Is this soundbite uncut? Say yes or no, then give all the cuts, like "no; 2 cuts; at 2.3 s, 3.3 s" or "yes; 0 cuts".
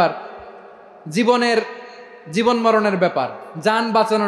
yes; 0 cuts